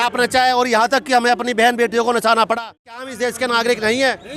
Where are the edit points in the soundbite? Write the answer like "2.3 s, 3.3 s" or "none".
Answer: 3.1 s